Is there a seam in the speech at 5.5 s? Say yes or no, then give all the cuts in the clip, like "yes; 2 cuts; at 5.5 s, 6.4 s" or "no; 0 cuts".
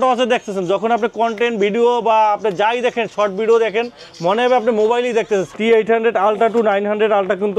yes; 1 cut; at 5.5 s